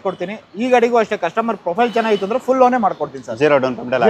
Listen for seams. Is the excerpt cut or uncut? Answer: uncut